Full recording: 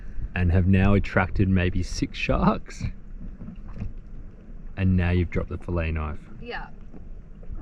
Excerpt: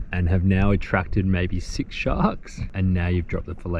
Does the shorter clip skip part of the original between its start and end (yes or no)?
yes